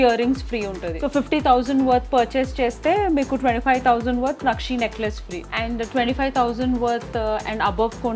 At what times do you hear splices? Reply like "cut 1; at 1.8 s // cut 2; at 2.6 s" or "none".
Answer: cut 1; at 0.9 s // cut 2; at 5.4 s